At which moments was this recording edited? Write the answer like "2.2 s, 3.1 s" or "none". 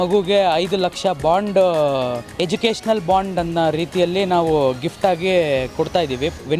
2.2 s